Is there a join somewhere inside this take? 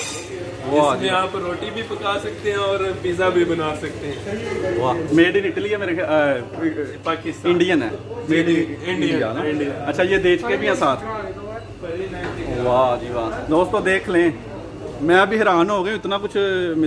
no; 0 cuts

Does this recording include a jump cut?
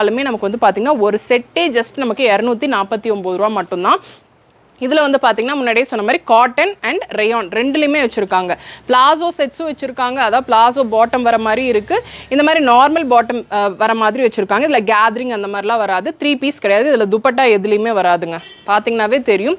no; 0 cuts

